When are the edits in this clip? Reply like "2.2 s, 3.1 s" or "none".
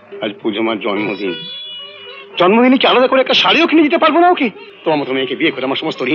4.7 s